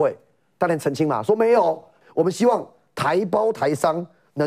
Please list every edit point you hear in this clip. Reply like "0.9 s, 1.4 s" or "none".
1.9 s

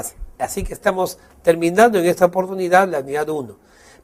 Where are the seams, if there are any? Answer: 1.0 s

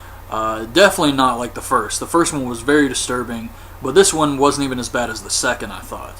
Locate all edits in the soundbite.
4.4 s

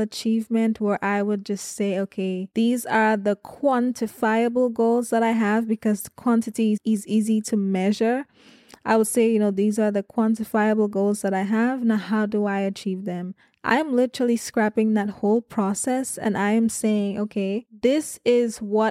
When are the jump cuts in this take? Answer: 6.8 s

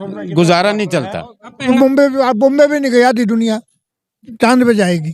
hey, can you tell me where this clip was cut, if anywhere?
1.7 s

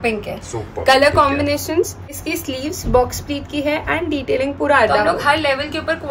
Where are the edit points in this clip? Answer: 2.2 s, 5.0 s

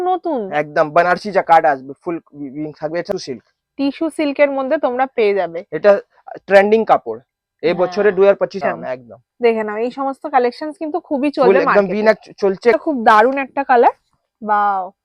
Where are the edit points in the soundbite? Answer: 3.1 s, 8.5 s, 12.8 s

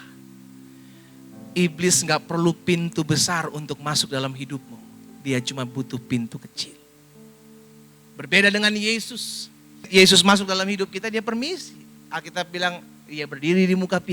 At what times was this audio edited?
9.9 s

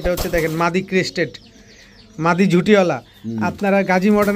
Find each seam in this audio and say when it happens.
none

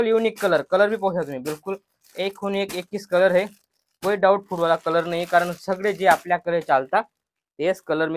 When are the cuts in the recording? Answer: none

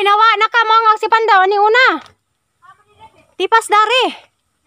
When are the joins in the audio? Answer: none

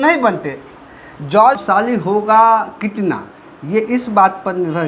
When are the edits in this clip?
1.6 s

